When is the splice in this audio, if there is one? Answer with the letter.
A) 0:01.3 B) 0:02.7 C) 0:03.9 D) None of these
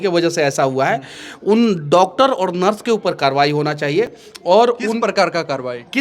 D